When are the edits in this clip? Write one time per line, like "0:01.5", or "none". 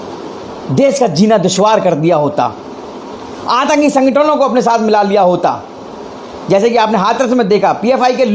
none